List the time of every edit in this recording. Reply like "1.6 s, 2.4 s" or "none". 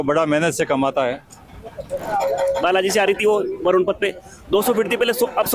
2.0 s